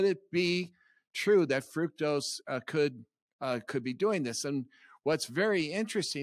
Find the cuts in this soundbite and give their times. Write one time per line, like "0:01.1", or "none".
none

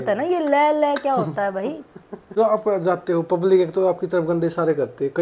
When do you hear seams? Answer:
0:02.1

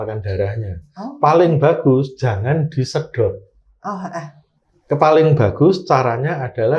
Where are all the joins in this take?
none

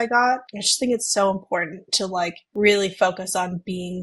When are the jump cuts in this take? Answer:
none

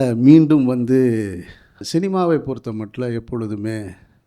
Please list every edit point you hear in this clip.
0:01.8

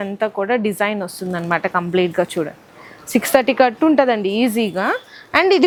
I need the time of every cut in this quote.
none

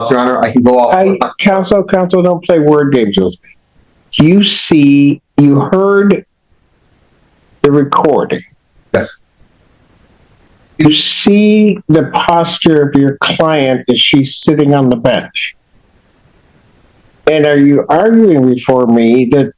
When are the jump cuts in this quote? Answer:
none

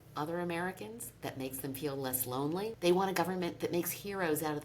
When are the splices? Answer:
0:02.8

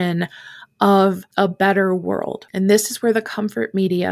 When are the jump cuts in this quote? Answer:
0:01.2
0:02.4

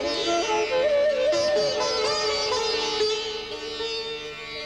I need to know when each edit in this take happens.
none

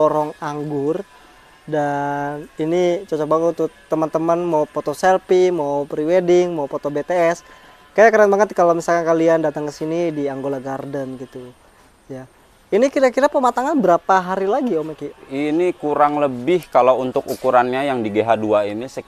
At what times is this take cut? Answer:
none

